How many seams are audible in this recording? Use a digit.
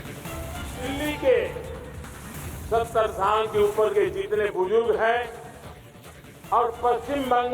1